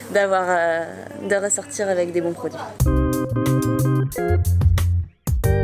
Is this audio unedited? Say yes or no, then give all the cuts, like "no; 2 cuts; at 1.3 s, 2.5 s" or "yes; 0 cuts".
no; 1 cut; at 2.7 s